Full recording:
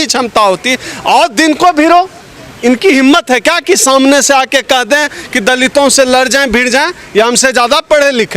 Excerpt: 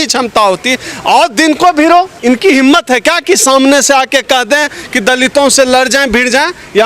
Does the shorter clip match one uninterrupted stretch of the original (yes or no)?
no